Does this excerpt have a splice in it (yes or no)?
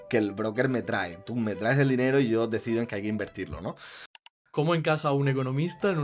yes